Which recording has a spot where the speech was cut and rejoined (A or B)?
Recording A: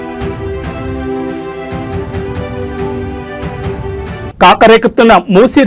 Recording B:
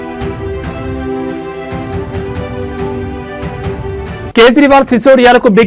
A